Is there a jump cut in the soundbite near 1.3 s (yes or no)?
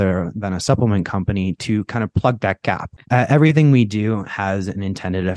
no